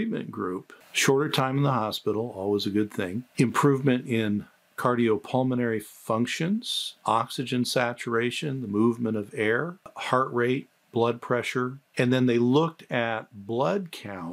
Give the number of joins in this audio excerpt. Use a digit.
2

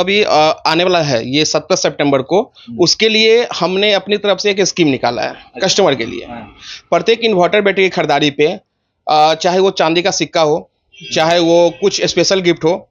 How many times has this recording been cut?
0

